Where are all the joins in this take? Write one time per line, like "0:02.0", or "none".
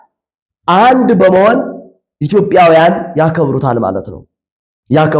none